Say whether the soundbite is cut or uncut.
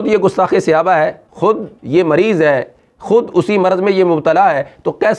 cut